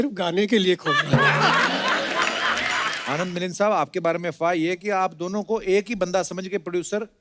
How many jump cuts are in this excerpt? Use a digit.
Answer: 1